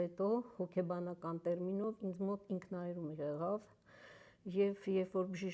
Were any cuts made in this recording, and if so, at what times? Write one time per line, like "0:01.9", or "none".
none